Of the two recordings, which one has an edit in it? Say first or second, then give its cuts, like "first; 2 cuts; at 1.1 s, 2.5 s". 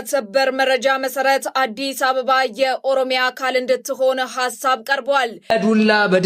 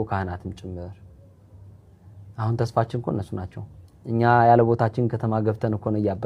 first; 1 cut; at 5.3 s